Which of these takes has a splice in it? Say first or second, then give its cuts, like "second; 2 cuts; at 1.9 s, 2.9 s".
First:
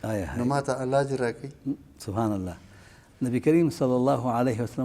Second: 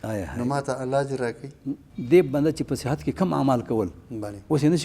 second; 1 cut; at 1.9 s